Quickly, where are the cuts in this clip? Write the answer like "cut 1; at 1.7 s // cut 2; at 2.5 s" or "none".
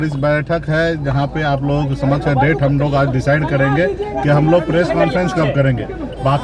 none